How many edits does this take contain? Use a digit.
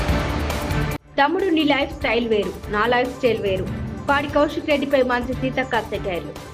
1